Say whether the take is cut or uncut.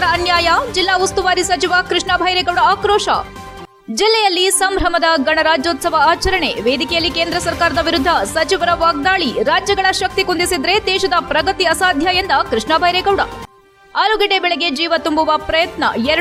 uncut